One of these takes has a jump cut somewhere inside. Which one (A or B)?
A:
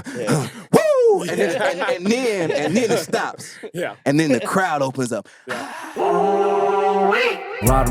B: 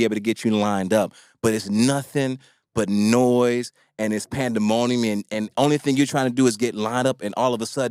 A